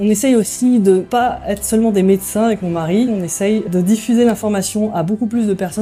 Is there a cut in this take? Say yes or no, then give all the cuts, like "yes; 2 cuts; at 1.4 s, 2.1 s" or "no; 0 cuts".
no; 0 cuts